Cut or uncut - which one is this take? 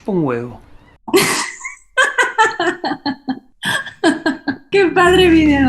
cut